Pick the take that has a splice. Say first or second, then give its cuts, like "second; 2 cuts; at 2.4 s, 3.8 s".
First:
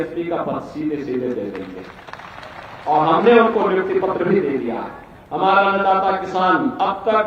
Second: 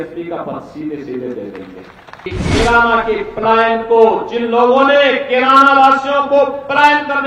second; 1 cut; at 2.3 s